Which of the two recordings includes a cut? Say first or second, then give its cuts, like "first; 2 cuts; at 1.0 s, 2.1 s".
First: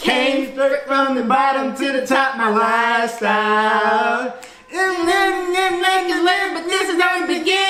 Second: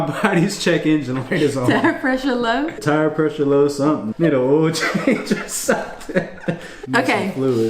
second; 3 cuts; at 2.8 s, 4.1 s, 6.7 s